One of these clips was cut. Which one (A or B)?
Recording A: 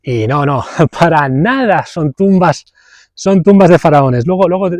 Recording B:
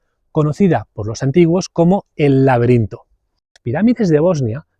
B